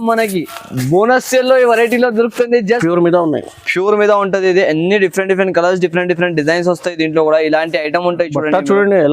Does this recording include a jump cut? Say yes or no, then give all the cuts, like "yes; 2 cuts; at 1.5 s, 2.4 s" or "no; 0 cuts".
yes; 1 cut; at 2.8 s